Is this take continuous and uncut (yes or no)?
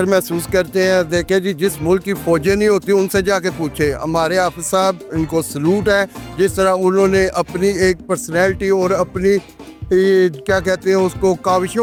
yes